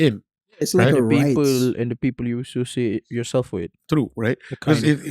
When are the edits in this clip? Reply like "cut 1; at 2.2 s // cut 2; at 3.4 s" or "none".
none